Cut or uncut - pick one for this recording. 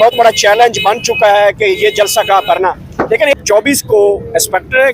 cut